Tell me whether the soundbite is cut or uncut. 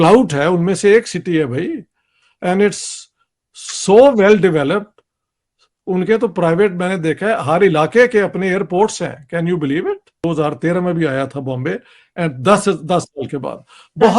cut